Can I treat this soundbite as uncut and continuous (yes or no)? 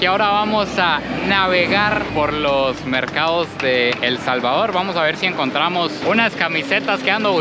yes